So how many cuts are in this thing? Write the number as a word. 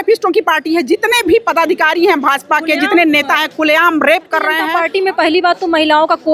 one